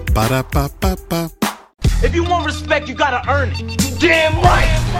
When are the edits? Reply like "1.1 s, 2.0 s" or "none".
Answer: 1.7 s